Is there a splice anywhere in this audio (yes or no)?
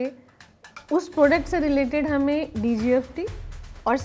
no